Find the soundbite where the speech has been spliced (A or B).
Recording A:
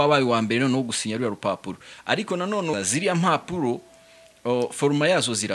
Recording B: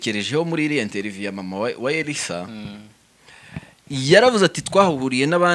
A